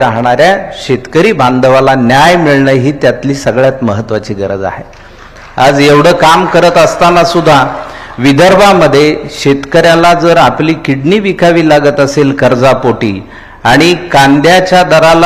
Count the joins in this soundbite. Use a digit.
0